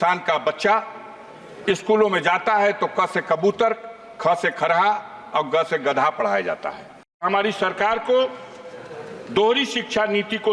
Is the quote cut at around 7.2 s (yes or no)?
yes